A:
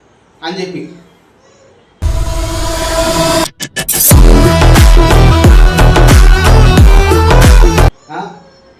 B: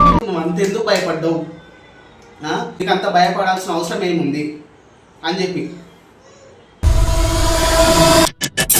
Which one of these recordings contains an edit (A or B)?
B